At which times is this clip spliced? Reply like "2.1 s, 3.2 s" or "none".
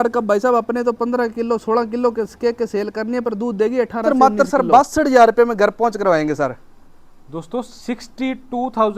4.0 s